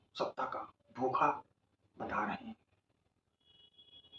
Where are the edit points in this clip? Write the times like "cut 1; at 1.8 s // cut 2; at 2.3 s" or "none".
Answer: none